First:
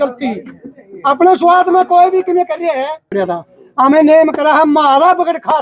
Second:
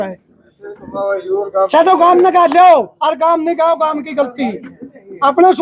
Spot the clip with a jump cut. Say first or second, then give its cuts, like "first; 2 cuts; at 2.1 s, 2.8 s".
first; 1 cut; at 3.1 s